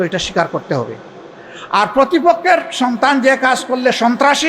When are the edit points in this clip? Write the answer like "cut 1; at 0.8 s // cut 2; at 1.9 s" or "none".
none